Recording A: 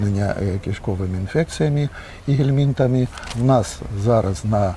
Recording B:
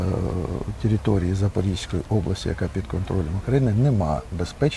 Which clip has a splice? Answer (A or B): A